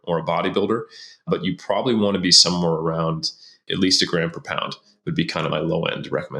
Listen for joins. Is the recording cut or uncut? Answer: cut